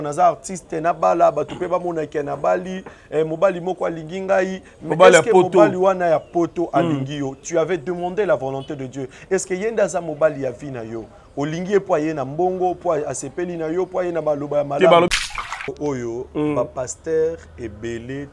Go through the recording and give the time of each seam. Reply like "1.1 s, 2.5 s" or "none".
15.2 s